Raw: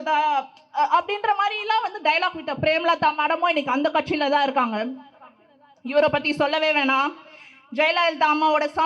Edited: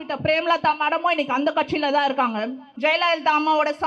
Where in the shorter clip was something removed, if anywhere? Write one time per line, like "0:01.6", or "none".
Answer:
0:02.6